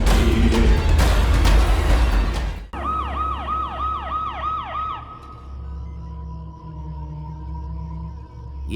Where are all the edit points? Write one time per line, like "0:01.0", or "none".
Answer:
0:02.6

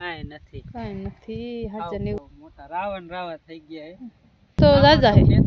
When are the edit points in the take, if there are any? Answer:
0:02.2
0:04.6

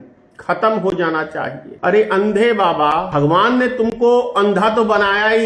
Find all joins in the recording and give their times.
0:01.6
0:03.1

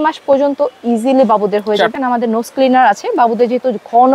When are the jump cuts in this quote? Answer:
0:01.9

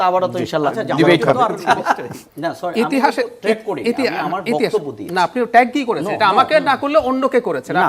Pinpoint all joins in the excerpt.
0:02.2

